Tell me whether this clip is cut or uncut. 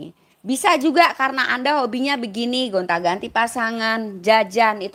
uncut